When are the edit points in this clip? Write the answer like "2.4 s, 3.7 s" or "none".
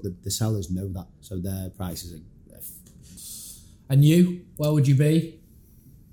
3.1 s